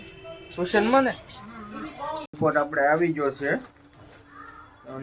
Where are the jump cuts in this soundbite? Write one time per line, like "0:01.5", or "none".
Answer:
0:02.3

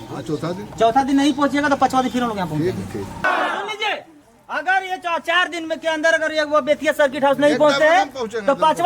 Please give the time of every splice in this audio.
0:03.3

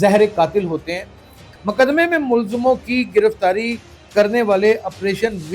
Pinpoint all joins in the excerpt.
0:01.5

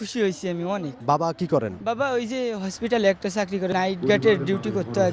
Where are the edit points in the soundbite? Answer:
0:00.9
0:01.8
0:03.7

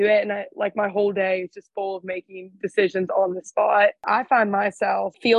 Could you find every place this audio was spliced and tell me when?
0:04.0

